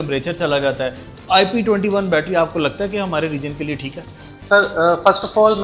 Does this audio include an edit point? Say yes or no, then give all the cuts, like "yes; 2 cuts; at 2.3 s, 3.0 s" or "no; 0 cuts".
no; 0 cuts